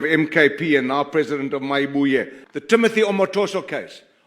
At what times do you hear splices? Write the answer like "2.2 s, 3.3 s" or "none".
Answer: 2.4 s